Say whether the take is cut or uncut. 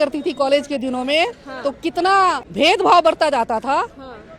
cut